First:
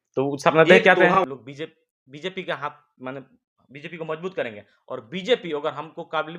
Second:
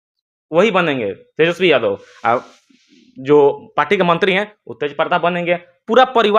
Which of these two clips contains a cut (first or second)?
first